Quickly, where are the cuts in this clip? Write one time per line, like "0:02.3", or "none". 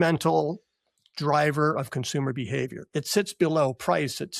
none